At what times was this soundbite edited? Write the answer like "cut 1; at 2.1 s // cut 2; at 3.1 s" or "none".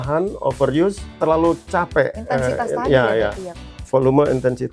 cut 1; at 1.1 s // cut 2; at 3.7 s

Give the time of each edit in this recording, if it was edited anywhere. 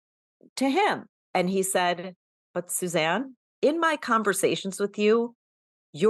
cut 1; at 1.1 s // cut 2; at 3.4 s

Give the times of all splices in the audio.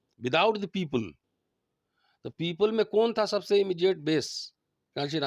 none

